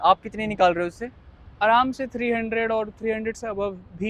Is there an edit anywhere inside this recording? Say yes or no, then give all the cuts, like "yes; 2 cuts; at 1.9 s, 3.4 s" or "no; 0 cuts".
no; 0 cuts